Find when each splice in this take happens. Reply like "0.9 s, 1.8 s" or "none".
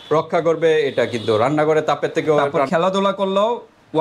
2.6 s